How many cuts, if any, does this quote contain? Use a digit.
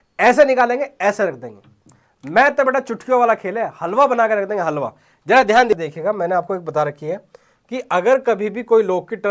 1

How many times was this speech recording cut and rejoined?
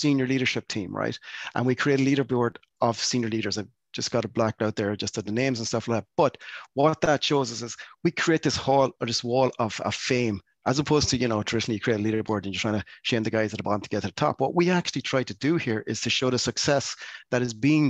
0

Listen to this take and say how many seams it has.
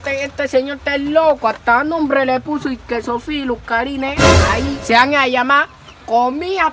0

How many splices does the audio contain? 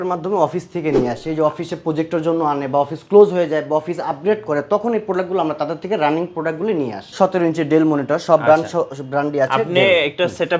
1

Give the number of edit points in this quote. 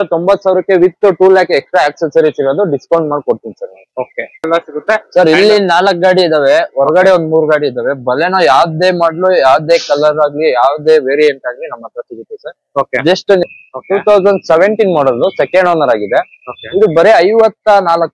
2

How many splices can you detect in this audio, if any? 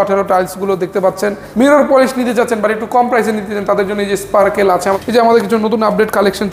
2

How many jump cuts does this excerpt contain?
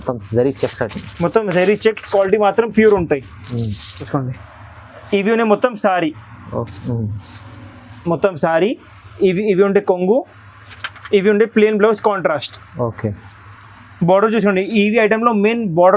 1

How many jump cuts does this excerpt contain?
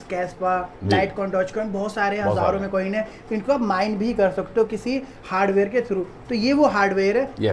0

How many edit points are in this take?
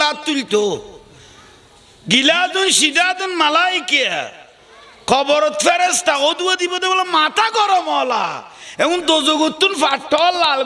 0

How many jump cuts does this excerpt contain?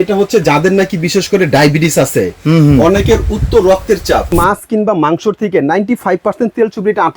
1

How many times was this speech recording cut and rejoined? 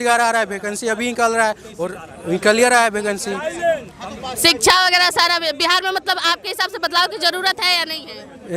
0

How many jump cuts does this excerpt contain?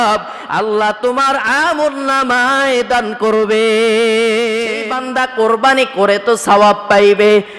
1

